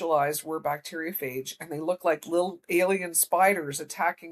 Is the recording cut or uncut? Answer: uncut